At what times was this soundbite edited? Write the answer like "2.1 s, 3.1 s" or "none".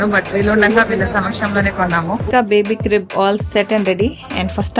2.3 s